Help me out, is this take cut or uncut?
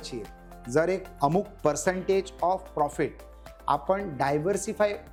uncut